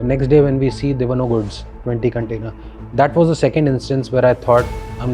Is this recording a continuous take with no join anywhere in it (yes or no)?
yes